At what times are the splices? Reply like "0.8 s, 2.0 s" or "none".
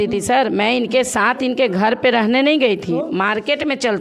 none

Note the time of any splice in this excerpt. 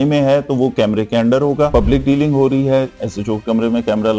1.7 s

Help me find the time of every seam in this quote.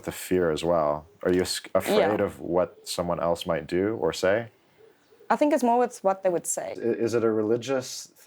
6.6 s

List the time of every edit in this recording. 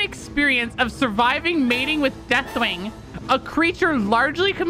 none

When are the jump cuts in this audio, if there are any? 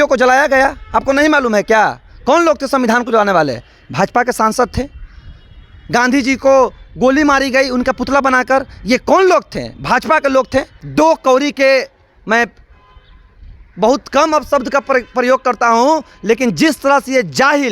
10.8 s

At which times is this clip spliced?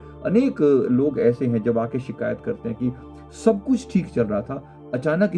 none

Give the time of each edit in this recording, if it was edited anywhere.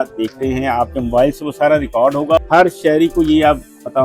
2.4 s

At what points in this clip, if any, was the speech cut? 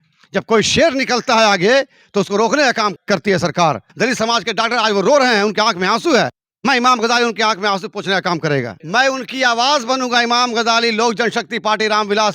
3.0 s, 3.9 s, 8.8 s

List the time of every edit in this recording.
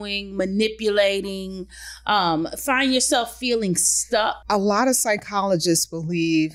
4.4 s

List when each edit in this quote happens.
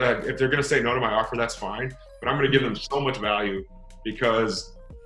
none

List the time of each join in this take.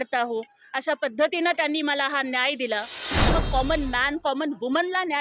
3.3 s

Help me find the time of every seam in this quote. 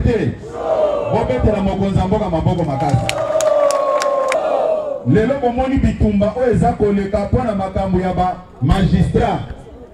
4.3 s

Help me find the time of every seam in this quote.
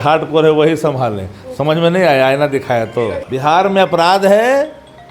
3.2 s

